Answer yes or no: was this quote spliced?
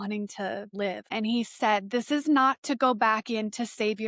yes